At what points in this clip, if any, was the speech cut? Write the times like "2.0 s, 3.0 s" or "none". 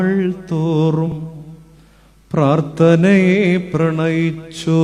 1.1 s